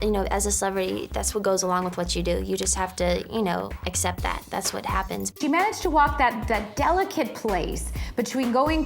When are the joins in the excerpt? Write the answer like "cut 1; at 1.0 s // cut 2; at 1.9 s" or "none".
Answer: cut 1; at 5.4 s